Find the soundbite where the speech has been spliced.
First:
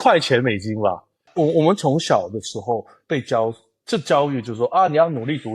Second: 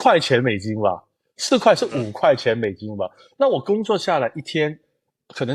first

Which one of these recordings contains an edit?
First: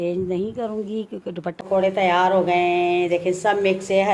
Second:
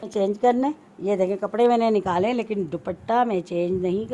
first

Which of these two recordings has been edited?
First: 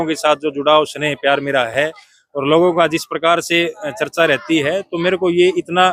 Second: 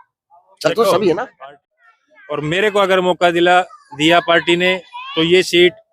second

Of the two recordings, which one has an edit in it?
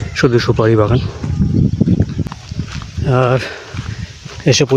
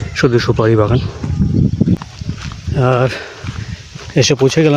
second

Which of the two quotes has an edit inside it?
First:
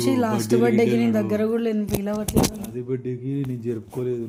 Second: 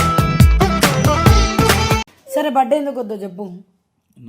second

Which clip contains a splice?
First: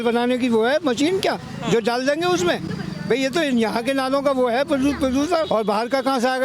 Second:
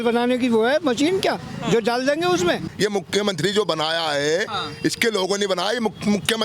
second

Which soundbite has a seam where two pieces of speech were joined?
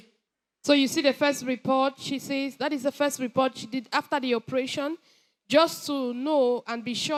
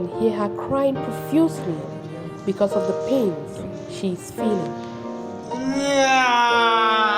second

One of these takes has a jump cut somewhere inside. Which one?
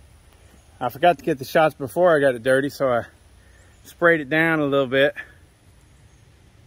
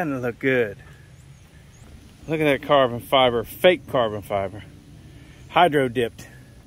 second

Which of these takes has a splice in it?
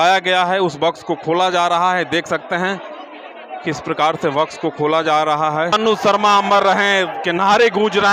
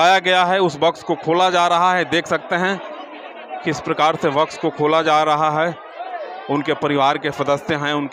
first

